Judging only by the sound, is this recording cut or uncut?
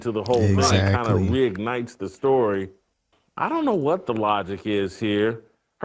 uncut